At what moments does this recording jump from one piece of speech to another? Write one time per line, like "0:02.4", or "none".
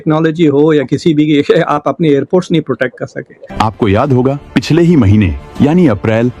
0:03.4